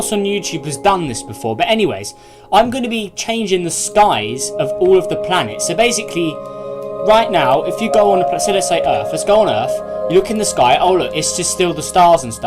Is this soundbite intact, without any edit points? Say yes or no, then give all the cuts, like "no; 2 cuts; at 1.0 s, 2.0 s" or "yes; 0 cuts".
no; 1 cut; at 4.7 s